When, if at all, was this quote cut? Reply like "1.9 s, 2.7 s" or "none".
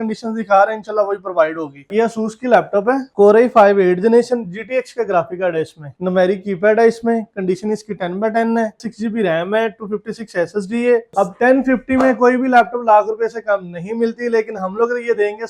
1.8 s, 5.9 s, 8.8 s, 11.1 s